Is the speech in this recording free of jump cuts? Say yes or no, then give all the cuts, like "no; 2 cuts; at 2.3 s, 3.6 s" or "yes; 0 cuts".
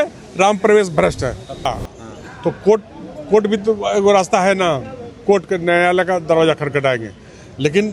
no; 1 cut; at 1.7 s